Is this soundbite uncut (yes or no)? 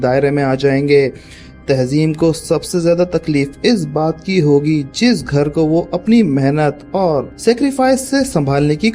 no